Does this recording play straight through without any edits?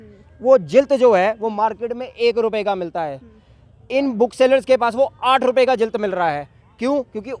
yes; 0 cuts

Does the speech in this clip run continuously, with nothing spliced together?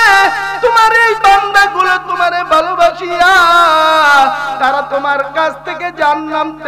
yes; 0 cuts

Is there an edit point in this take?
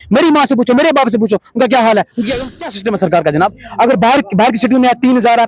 yes; 1 cut; at 2.4 s

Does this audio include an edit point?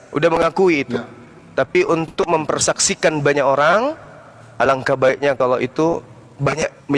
no; 0 cuts

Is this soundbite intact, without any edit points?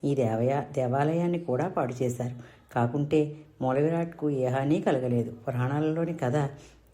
no; 1 cut; at 5.5 s

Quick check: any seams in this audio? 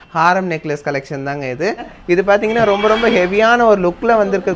yes; 1 cut; at 1.9 s

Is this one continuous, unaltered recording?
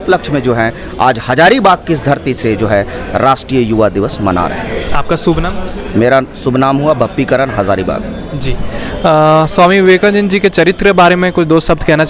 yes; 0 cuts

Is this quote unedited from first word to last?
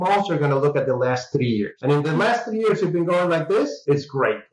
yes; 0 cuts

